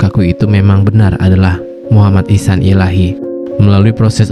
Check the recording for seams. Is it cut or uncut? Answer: cut